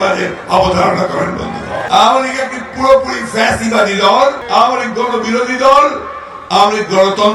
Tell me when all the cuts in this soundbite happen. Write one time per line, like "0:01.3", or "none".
0:01.8
0:04.4